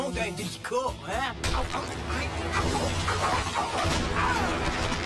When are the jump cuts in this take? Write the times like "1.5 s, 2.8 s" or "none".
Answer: none